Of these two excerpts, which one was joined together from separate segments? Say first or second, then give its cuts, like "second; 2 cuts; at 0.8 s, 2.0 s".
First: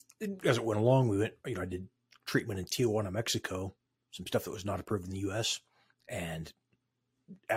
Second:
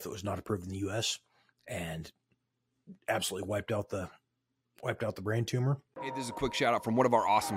second; 1 cut; at 5.9 s